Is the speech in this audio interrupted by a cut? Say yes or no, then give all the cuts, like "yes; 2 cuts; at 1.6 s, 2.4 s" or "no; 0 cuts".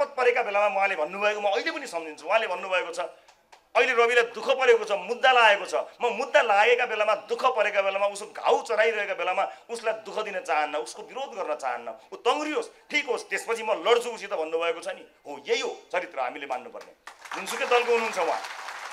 no; 0 cuts